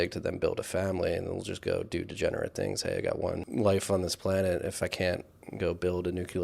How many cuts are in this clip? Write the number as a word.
one